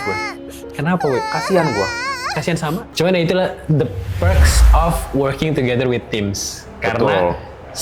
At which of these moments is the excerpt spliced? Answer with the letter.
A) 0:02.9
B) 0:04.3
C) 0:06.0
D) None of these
A